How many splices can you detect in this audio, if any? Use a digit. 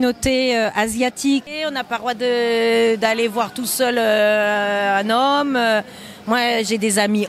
1